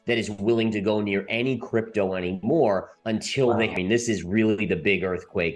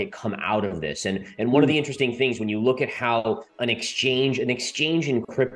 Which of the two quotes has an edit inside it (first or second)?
first